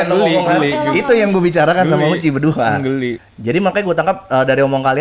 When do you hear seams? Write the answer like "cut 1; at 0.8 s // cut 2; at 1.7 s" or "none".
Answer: cut 1; at 3.3 s